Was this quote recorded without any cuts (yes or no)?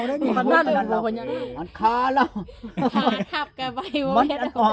no